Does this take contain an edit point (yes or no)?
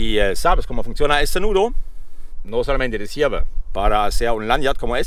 no